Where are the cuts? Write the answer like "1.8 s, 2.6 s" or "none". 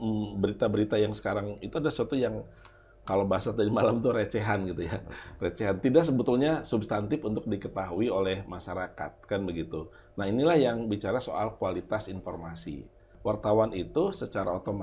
13.1 s